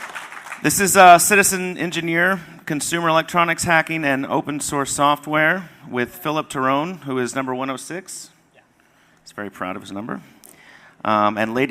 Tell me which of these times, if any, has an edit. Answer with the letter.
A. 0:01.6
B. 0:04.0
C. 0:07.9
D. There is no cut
B